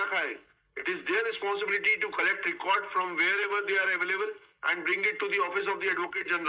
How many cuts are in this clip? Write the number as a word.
zero